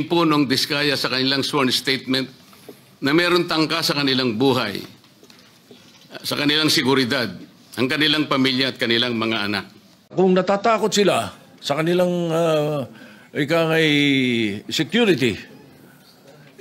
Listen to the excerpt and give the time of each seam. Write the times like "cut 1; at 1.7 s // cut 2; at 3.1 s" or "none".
cut 1; at 10.1 s